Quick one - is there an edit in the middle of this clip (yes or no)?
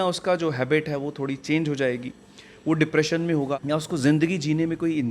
yes